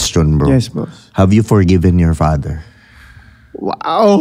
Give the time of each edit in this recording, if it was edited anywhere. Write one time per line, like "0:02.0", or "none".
none